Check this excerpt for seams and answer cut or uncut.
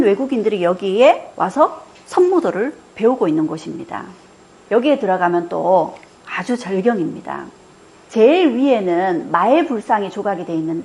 uncut